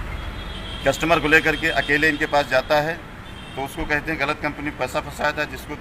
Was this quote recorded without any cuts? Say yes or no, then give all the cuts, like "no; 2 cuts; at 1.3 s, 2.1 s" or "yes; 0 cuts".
yes; 0 cuts